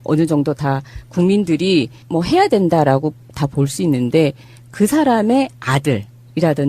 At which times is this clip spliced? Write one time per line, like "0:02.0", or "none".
0:01.1